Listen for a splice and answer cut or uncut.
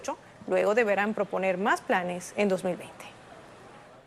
cut